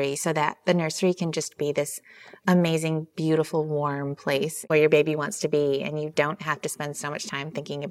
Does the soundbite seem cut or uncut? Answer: cut